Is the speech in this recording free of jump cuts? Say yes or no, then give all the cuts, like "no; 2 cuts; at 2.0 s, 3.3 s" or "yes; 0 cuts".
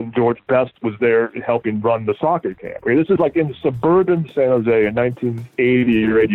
yes; 0 cuts